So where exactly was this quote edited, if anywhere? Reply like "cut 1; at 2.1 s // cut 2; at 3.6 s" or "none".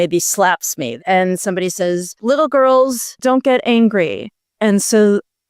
cut 1; at 0.9 s // cut 2; at 2.1 s // cut 3; at 3.2 s